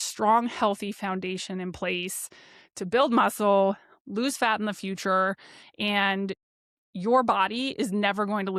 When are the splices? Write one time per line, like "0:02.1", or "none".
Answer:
none